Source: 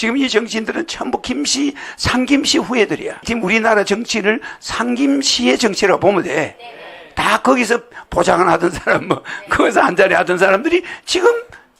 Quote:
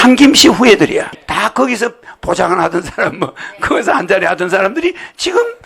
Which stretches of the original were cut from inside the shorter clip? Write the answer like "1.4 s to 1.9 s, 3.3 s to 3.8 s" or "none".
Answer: 3.1 s to 6.9 s